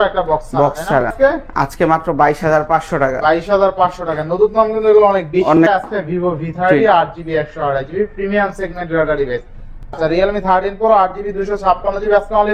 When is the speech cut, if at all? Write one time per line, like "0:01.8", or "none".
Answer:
0:01.1
0:05.6
0:09.9

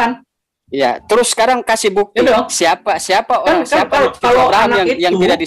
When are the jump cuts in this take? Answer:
none

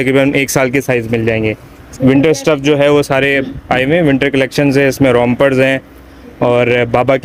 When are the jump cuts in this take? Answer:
none

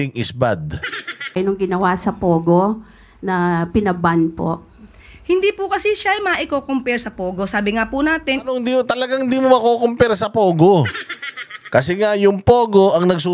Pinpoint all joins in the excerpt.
0:01.2

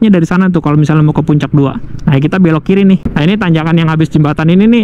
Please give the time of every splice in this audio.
0:03.1

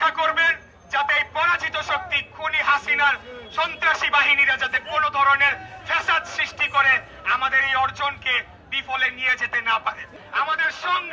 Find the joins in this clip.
0:10.1

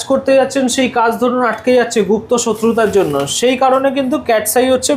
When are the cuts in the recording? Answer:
none

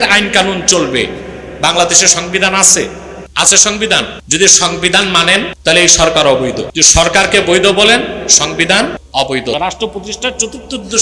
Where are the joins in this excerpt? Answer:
0:04.2
0:05.5
0:06.7
0:09.5

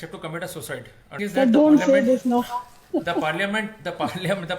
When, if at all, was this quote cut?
0:01.2

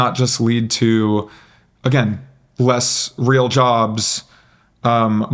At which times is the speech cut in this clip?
none

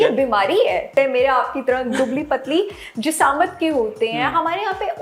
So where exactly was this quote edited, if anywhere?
0:00.9

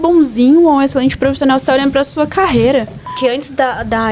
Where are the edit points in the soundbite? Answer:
0:03.1

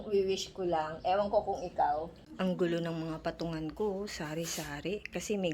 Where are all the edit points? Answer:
0:01.7

